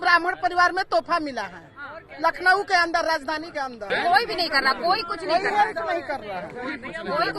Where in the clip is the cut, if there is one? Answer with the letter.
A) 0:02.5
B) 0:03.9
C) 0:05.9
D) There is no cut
B